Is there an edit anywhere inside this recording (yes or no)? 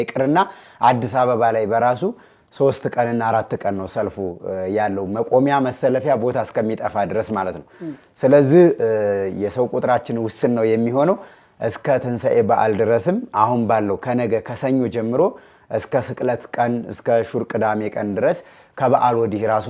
no